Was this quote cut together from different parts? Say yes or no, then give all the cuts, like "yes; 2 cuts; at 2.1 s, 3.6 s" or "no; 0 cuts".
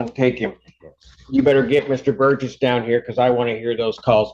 no; 0 cuts